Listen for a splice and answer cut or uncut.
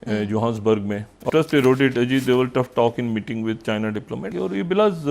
cut